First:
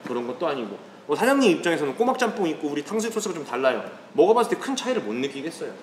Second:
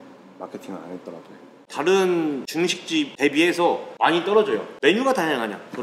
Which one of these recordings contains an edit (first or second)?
second